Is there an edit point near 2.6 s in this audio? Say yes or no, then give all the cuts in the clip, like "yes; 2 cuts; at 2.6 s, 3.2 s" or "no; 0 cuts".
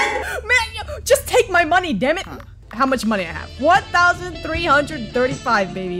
yes; 1 cut; at 2.6 s